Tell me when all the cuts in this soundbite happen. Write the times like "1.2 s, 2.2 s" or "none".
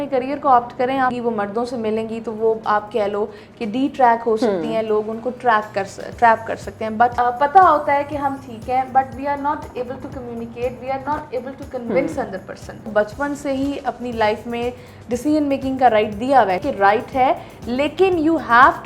1.1 s, 7.1 s, 12.8 s, 16.6 s